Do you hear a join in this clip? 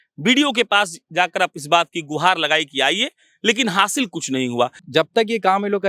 yes; 1 cut; at 4.9 s

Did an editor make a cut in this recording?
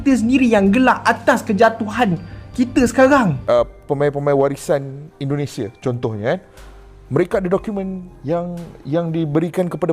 yes; 1 cut; at 3.4 s

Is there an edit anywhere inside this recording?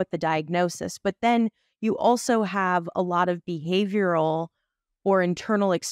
no; 0 cuts

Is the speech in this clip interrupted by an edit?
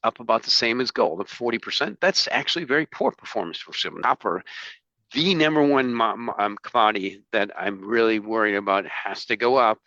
yes; 1 cut; at 3.9 s

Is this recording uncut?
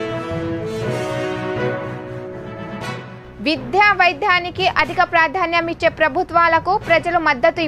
yes; 0 cuts

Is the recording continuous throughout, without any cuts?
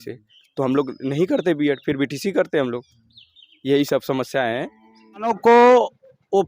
no; 1 cut; at 5.3 s

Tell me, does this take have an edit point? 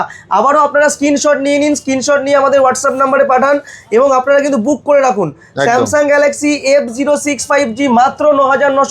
no; 0 cuts

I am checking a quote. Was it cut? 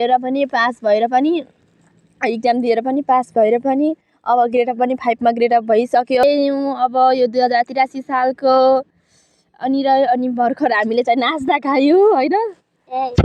yes; 1 cut; at 6.2 s

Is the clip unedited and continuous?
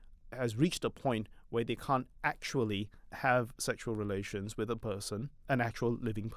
no; 2 cuts; at 3.0 s, 5.4 s

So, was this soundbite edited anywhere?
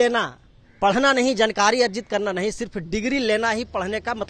no; 0 cuts

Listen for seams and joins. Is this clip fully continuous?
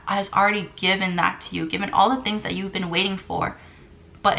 yes; 0 cuts

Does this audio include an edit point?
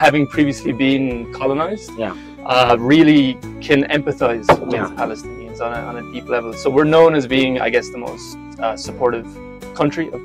no; 0 cuts

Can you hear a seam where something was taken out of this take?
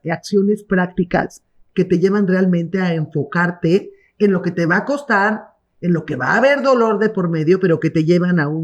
no; 0 cuts

